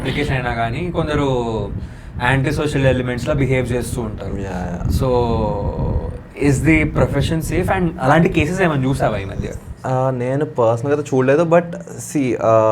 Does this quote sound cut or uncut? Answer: uncut